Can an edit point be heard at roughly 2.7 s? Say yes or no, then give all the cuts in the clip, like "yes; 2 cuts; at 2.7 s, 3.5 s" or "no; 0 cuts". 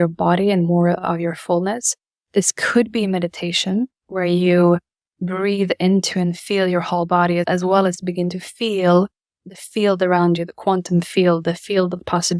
no; 3 cuts; at 4.0 s, 7.5 s, 9.4 s